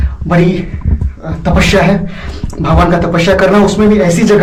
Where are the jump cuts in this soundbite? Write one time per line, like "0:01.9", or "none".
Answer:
none